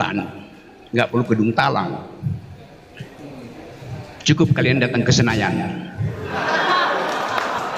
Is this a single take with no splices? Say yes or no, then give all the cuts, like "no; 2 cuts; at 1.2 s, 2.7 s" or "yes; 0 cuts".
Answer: yes; 0 cuts